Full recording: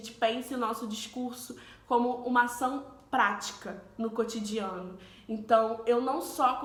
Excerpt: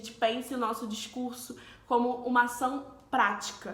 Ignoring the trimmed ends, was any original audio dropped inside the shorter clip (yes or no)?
no